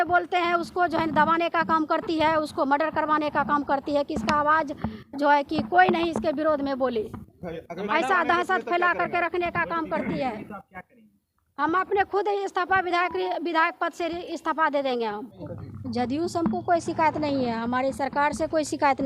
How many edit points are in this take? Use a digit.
1